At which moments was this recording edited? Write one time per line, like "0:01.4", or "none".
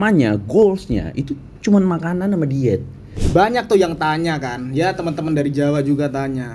0:03.2

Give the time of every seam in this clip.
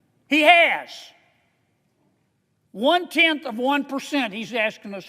none

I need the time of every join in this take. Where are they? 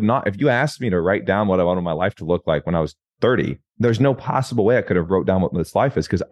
0:03.6

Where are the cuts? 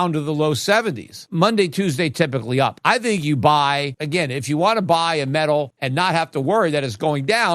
0:01.1
0:02.8
0:03.9
0:05.8

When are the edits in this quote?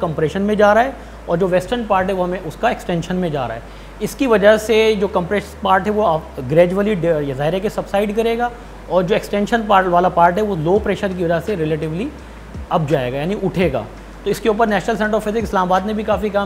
none

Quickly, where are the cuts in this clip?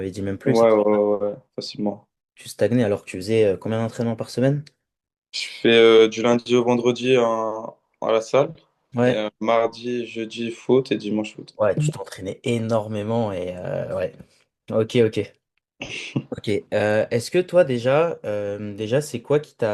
none

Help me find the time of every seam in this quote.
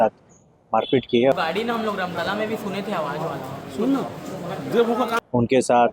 0:01.3
0:05.2

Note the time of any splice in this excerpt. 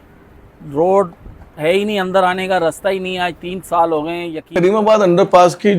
0:04.5

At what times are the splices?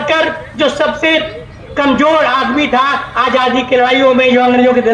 none

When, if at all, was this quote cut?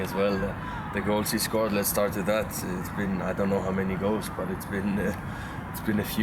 none

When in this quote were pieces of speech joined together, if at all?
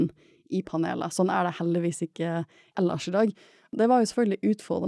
0:02.6
0:03.7

